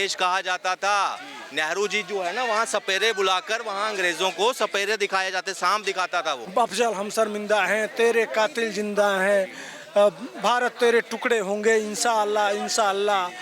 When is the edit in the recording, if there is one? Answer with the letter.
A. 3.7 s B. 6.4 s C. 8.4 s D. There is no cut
B